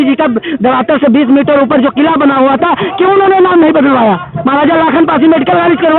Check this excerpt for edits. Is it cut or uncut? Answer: uncut